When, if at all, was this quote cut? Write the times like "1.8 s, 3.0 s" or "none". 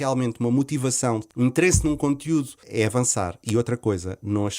1.2 s, 2.6 s